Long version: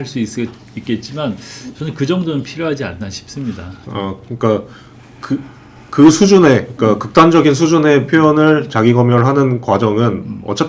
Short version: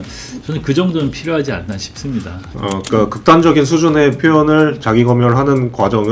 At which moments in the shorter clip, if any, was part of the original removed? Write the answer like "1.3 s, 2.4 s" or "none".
2.8 s